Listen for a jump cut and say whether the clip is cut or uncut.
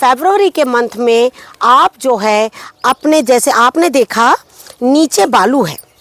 uncut